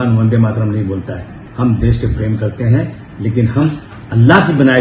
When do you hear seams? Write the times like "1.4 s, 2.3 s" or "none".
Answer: 1.4 s